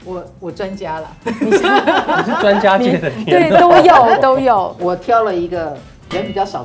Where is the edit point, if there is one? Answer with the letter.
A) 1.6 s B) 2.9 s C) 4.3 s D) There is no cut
D